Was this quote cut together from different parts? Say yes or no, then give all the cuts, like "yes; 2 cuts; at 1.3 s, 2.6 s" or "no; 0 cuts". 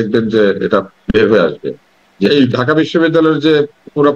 yes; 1 cut; at 2.3 s